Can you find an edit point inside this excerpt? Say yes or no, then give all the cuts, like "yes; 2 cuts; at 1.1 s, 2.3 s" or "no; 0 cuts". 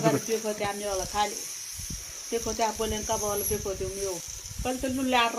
yes; 1 cut; at 4.3 s